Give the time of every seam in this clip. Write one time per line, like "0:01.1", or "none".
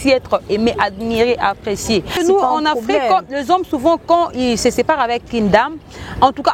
0:02.2